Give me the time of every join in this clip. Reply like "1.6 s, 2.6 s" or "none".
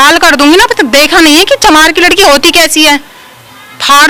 none